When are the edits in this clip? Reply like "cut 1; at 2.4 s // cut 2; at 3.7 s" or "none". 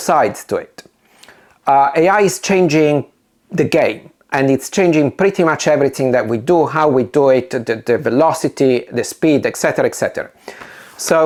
none

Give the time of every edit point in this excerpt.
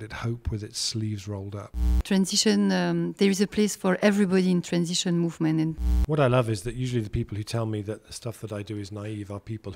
cut 1; at 2.0 s // cut 2; at 5.8 s

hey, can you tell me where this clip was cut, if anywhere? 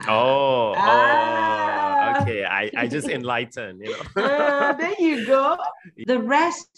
cut 1; at 5.9 s

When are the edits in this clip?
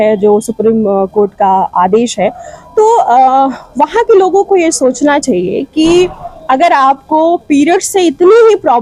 none

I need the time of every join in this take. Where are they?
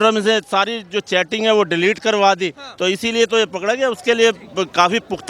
none

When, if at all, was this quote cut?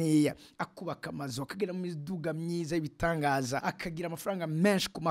cut 1; at 3.7 s

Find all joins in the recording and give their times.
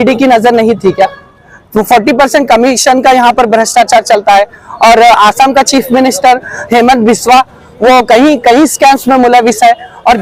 none

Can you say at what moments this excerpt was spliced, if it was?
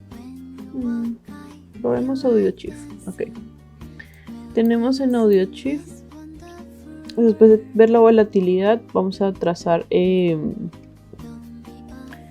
cut 1; at 0.7 s // cut 2; at 11.2 s

